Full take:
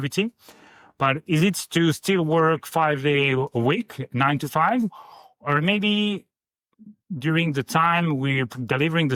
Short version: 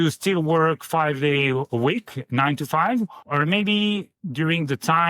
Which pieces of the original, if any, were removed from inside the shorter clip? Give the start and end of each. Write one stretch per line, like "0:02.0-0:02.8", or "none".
0:05.0-0:05.4
0:06.3-0:07.0